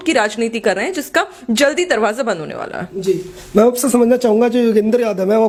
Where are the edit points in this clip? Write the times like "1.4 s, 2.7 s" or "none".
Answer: none